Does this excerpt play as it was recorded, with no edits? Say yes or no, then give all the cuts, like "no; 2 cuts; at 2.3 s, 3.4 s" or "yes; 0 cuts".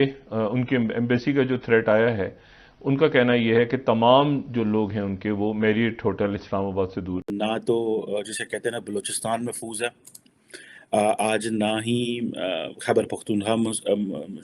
no; 1 cut; at 7.3 s